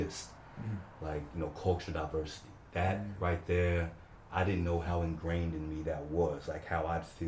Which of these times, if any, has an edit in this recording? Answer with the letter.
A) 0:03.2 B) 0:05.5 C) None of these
C